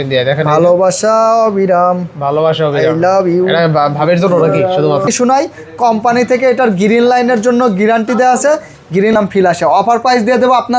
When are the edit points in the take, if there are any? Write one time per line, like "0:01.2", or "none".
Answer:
0:05.1
0:09.1